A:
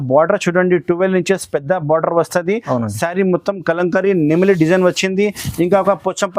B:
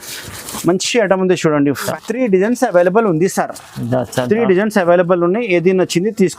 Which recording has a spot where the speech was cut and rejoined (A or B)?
B